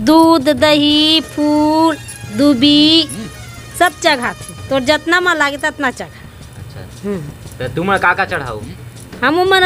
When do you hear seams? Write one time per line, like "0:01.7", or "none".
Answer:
none